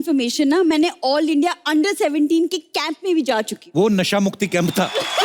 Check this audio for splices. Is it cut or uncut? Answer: uncut